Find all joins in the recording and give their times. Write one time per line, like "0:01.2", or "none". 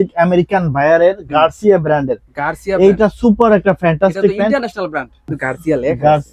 none